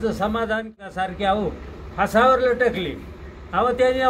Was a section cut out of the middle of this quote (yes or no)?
yes